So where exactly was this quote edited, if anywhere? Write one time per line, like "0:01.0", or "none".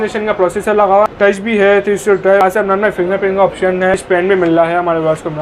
0:01.1
0:02.4
0:04.0